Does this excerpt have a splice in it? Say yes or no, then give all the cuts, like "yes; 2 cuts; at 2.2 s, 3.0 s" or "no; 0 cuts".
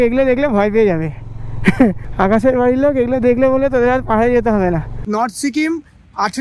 yes; 2 cuts; at 2.0 s, 4.9 s